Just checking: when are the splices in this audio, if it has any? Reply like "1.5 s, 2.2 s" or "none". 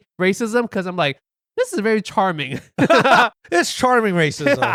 none